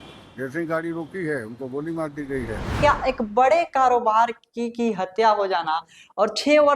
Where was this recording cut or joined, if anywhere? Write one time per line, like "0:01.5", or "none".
0:02.7